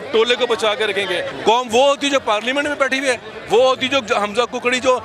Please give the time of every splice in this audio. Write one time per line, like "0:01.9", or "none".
0:01.3